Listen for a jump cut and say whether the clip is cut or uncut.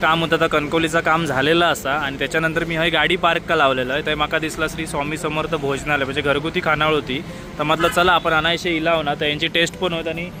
uncut